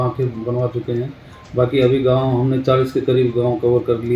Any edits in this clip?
no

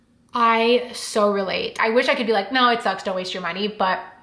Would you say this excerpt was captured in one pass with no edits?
no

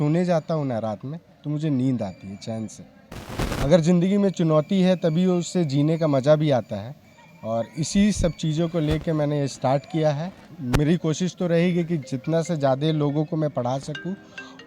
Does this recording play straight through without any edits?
no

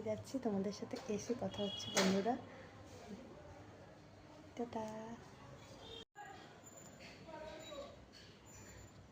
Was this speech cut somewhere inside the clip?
yes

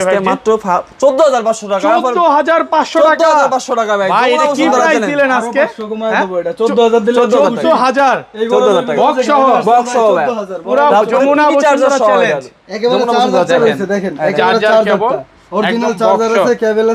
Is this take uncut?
yes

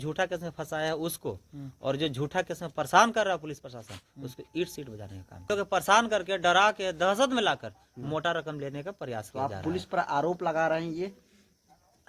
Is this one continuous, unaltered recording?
no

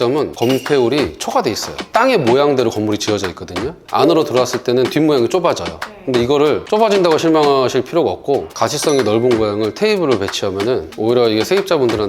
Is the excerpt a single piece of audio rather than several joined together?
no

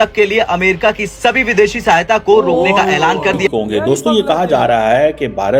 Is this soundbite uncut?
no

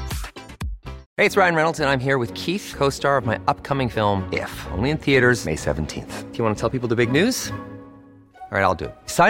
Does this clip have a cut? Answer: yes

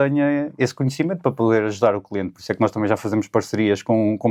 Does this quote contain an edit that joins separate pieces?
no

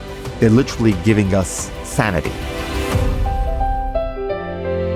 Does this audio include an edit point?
yes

